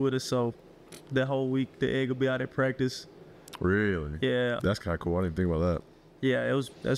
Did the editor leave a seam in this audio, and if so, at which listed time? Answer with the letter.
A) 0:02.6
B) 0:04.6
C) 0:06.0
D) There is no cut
B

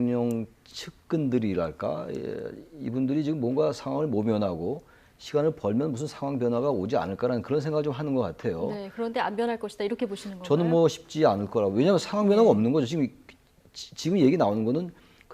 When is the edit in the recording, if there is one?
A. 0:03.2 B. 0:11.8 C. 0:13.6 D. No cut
B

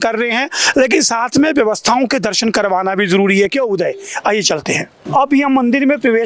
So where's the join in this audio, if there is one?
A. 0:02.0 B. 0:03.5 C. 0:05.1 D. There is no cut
D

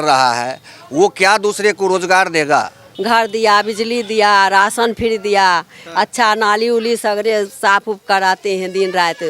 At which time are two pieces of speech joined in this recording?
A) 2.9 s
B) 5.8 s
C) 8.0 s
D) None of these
A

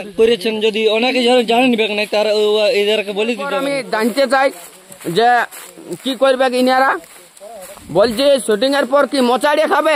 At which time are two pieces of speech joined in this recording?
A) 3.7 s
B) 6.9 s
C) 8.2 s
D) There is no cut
A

